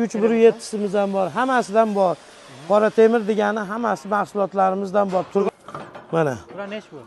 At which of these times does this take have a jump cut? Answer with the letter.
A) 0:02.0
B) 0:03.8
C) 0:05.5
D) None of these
C